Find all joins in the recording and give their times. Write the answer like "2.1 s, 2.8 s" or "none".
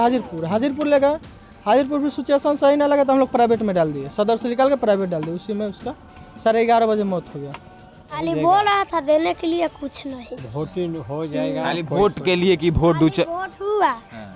8.2 s